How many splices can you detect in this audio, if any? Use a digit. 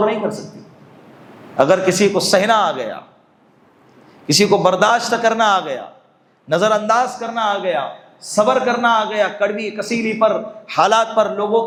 0